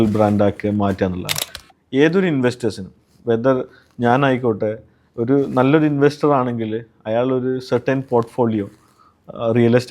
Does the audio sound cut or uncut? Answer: cut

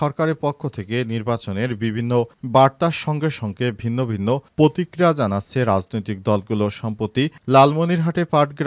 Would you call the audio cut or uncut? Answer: uncut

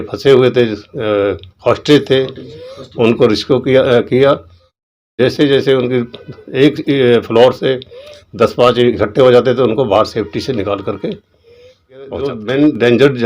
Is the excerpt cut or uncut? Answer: cut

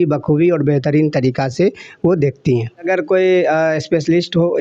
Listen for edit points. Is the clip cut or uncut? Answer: cut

